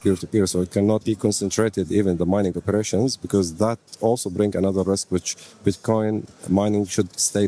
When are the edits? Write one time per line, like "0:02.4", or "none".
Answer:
0:01.0